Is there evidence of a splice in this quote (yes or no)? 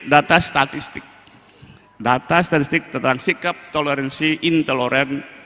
no